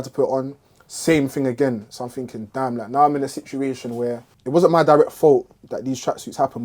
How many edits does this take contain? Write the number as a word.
one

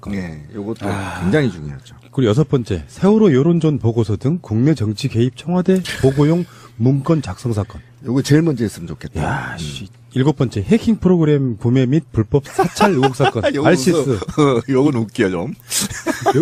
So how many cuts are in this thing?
zero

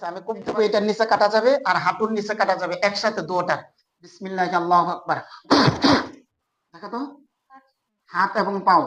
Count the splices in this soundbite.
one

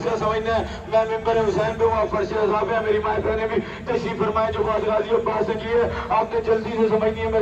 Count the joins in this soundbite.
zero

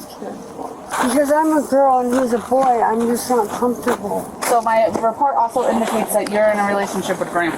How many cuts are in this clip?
two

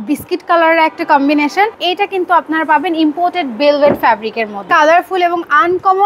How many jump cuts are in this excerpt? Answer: two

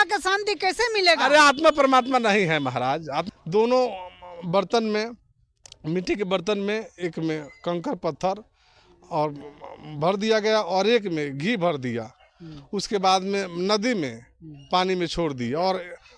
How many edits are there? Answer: one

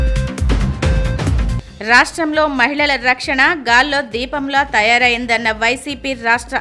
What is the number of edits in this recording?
one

